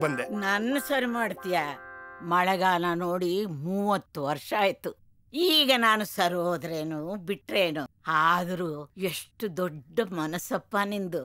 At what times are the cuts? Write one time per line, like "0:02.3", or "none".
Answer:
0:08.0
0:08.9